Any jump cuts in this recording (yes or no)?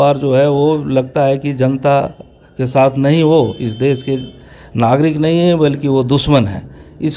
no